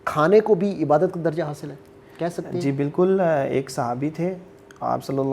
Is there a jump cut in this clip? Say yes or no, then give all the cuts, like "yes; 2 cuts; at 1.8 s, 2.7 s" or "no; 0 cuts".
no; 0 cuts